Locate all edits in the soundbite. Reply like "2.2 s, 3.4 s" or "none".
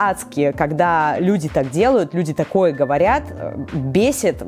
none